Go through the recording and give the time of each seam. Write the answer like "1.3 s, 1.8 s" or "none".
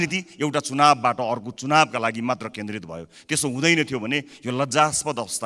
none

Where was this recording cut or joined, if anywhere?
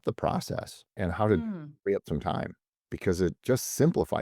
0.9 s, 1.7 s, 3.4 s

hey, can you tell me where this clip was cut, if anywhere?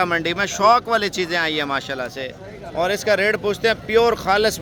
none

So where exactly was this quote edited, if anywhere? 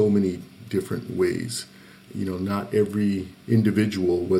none

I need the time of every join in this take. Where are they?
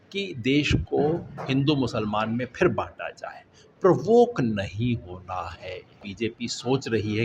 6.1 s

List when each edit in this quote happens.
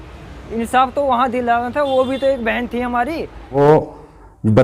3.6 s

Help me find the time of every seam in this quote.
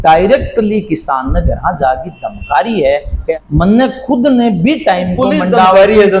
3.3 s

